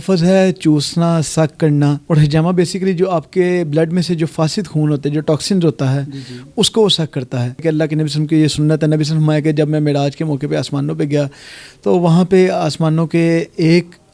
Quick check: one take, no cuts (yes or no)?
no